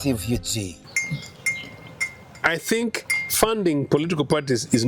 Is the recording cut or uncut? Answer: cut